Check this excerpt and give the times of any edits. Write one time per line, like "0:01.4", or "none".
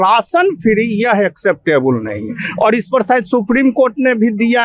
none